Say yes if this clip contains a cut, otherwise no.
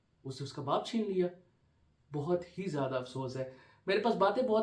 no